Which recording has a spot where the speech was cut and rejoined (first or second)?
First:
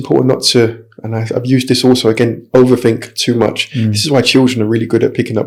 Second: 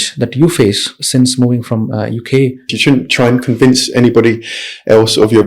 second